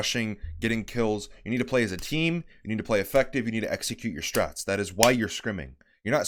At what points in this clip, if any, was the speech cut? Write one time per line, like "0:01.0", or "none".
none